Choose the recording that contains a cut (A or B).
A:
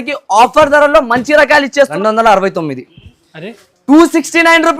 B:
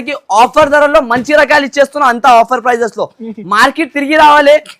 A